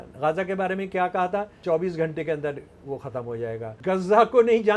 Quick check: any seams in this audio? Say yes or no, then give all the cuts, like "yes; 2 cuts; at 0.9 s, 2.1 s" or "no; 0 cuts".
yes; 2 cuts; at 1.5 s, 3.7 s